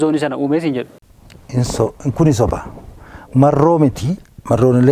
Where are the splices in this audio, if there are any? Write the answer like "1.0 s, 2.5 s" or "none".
none

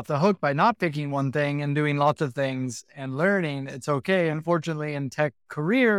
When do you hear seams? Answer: none

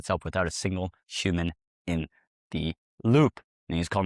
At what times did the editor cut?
none

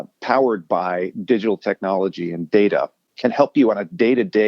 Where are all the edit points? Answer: 3.0 s

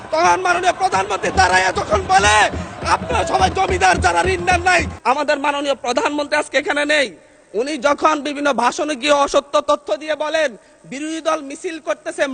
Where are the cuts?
4.9 s

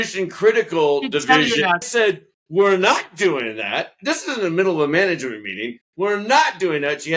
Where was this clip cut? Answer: 1.9 s

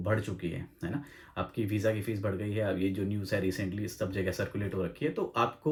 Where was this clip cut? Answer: none

